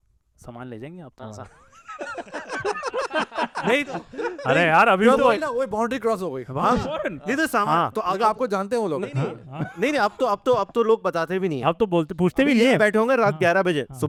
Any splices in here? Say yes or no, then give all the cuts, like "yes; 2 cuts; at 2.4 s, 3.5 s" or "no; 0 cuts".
no; 0 cuts